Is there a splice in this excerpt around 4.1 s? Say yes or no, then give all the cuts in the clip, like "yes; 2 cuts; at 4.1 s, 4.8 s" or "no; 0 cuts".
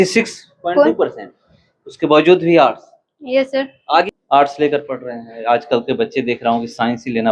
yes; 1 cut; at 4.1 s